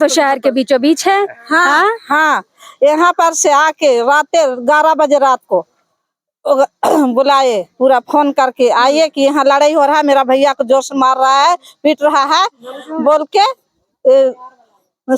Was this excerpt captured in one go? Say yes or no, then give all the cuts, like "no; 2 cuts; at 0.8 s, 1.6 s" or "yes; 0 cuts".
yes; 0 cuts